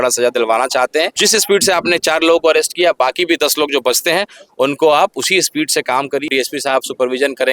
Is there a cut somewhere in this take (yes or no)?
yes